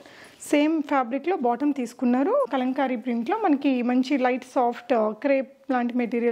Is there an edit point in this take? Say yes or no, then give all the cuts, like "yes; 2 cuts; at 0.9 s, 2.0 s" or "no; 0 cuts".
no; 0 cuts